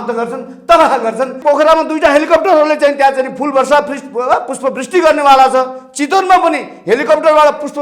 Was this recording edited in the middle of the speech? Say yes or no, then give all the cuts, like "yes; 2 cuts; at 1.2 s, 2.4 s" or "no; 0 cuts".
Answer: yes; 1 cut; at 1.4 s